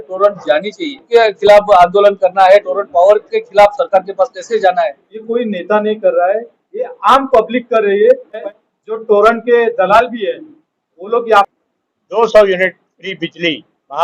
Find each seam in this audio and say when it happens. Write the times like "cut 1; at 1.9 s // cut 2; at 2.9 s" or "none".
cut 1; at 1.0 s // cut 2; at 5.1 s // cut 3; at 8.5 s // cut 4; at 11.5 s